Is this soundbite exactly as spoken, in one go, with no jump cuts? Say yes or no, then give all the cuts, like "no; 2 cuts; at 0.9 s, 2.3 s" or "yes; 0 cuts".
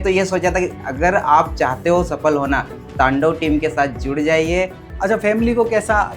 no; 1 cut; at 4.9 s